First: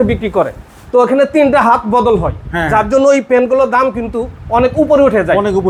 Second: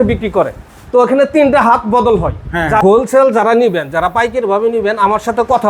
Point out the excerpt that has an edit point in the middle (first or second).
second